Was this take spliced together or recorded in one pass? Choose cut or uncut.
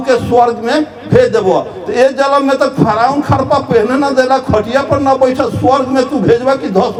uncut